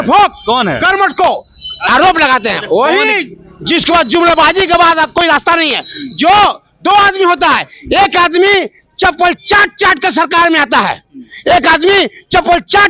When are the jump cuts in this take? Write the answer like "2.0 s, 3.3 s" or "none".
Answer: none